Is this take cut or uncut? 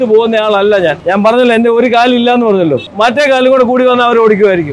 cut